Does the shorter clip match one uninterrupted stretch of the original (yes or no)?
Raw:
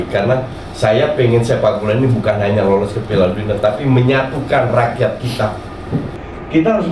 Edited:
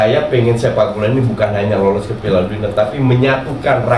yes